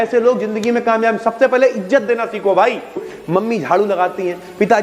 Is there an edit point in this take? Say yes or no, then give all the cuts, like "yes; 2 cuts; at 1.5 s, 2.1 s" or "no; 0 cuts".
yes; 1 cut; at 3.1 s